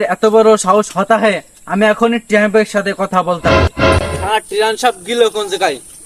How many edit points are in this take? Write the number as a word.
zero